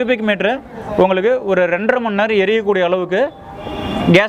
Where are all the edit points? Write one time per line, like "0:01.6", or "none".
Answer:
none